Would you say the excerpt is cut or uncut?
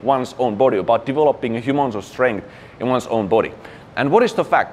uncut